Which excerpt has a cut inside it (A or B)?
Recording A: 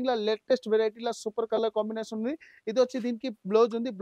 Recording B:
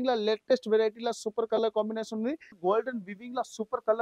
B